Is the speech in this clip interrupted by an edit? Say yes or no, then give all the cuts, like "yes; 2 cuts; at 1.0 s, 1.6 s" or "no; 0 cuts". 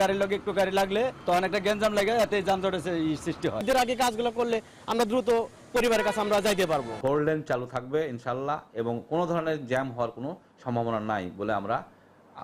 yes; 3 cuts; at 1.2 s, 3.6 s, 6.9 s